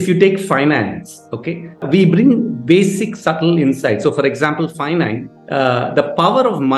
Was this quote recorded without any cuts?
yes; 0 cuts

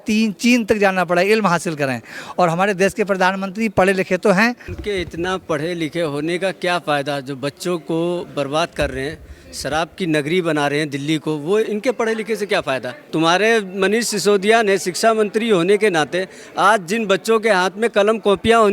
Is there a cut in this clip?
yes; 2 cuts; at 4.7 s, 13.0 s

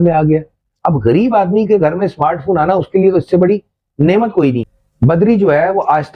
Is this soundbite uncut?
no; 1 cut; at 4.8 s

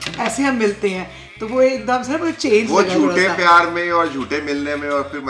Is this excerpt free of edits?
yes; 0 cuts

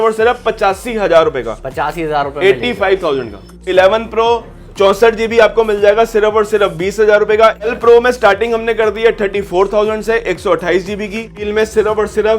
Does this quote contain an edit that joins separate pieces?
yes; 3 cuts; at 3.6 s, 7.7 s, 11.4 s

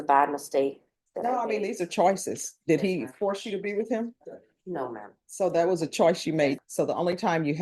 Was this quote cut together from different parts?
yes; 1 cut; at 6.6 s

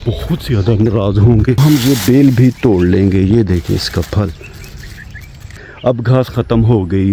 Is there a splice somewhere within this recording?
yes; 2 cuts; at 1.6 s, 5.6 s

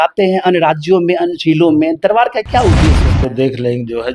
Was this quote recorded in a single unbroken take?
no; 1 cut; at 3.0 s

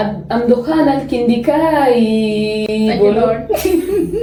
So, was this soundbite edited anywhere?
no; 0 cuts

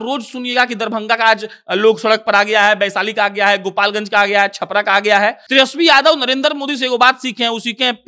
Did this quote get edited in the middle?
yes; 1 cut; at 5.4 s

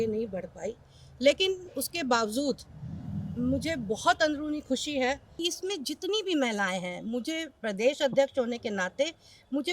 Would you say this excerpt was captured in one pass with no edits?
no; 1 cut; at 5.3 s

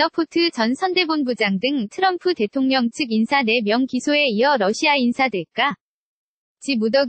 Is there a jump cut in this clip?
no; 0 cuts

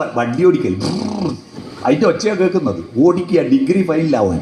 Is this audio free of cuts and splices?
yes; 0 cuts

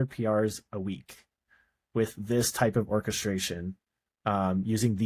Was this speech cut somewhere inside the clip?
no; 0 cuts

